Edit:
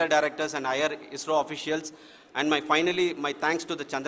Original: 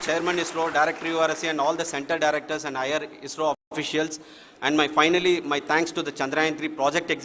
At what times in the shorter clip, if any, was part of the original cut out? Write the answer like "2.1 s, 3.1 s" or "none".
1.5 s